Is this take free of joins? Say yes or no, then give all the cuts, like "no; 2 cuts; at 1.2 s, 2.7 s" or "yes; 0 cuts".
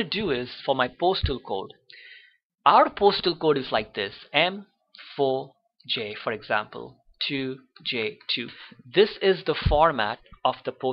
yes; 0 cuts